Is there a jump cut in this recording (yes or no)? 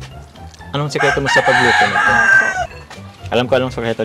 yes